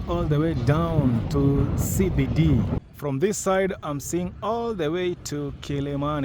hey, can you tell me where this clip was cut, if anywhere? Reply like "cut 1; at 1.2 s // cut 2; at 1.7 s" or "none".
cut 1; at 2.8 s